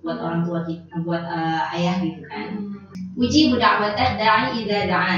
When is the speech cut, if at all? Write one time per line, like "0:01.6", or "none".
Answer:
0:02.9